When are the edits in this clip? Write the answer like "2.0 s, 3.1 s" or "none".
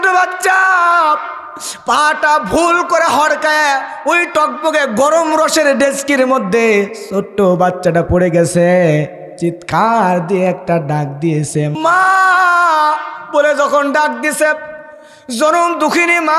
9.2 s, 11.7 s